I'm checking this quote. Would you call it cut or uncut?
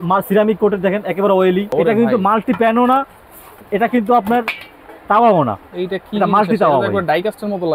cut